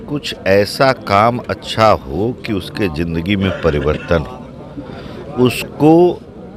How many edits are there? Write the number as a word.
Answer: zero